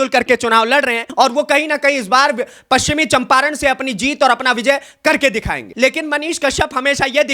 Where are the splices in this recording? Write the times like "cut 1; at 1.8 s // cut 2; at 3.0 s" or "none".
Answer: cut 1; at 1.0 s // cut 2; at 5.6 s